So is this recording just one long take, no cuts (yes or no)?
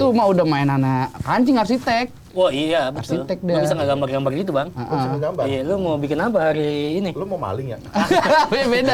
yes